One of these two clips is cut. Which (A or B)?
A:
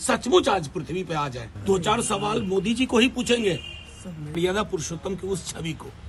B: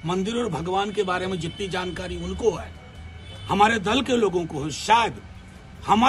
A